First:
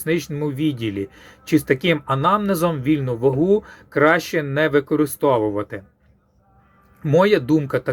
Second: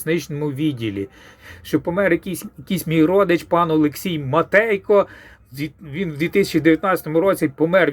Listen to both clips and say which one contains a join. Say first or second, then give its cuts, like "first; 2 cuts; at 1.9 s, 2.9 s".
second; 1 cut; at 1.3 s